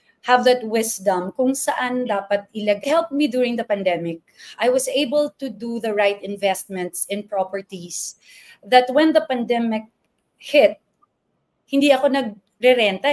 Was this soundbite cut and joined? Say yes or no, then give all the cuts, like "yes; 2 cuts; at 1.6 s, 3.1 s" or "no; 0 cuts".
yes; 1 cut; at 2.8 s